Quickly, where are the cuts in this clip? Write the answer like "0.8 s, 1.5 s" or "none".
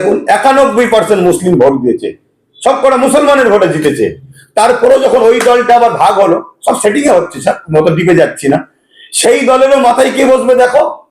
none